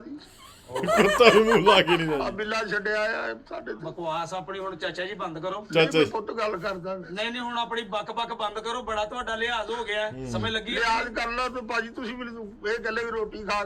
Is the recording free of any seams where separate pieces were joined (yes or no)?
yes